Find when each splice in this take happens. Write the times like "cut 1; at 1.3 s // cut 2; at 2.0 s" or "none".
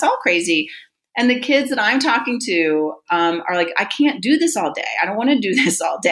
none